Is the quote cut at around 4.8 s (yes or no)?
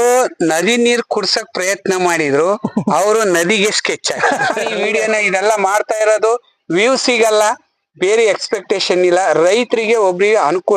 yes